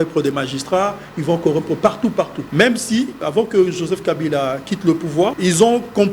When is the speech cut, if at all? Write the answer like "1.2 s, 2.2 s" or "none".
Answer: 2.4 s, 3.2 s, 5.4 s